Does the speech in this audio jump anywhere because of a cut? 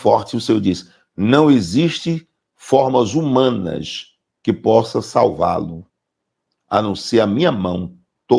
no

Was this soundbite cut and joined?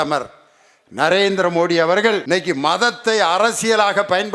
no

